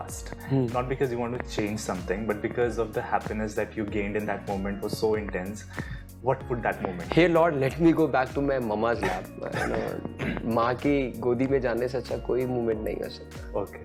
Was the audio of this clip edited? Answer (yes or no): no